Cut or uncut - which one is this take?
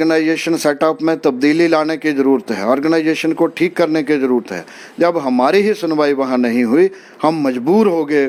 uncut